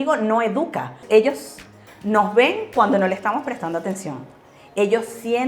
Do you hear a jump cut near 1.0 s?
yes; 1 cut; at 1.0 s

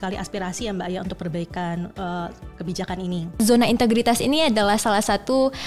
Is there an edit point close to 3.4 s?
yes; 1 cut; at 3.4 s

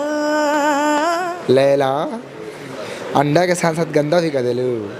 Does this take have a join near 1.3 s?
yes; 1 cut; at 1.3 s

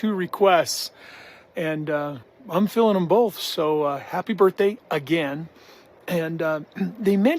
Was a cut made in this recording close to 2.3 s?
yes; 1 cut; at 2.3 s

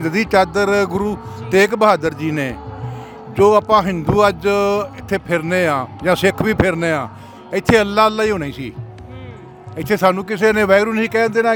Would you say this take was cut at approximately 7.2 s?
no; 0 cuts

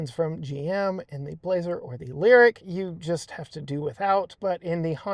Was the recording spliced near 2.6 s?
yes; 1 cut; at 2.6 s

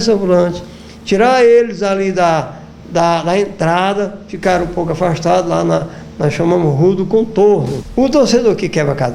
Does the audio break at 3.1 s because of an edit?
no; 1 cut; at 7.8 s

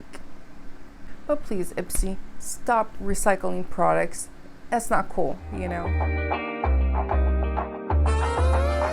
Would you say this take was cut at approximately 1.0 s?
yes; 2 cuts; at 1.0 s, 5.8 s

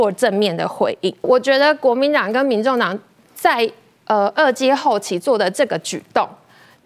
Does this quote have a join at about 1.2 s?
yes; 1 cut; at 1.2 s

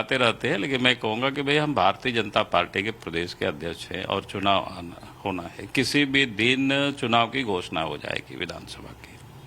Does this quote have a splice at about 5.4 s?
yes; 1 cut; at 5.4 s

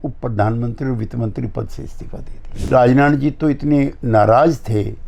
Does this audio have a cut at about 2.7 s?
yes; 1 cut; at 2.7 s

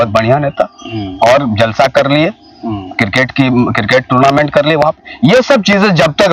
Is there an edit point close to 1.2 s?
no; 0 cuts

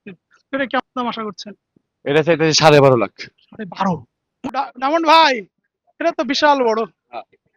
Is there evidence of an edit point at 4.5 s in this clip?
yes; 1 cut; at 4.5 s

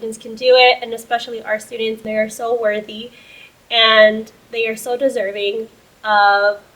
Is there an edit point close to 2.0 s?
yes; 1 cut; at 2.0 s

